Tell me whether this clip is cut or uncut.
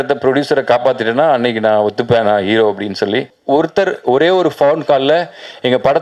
cut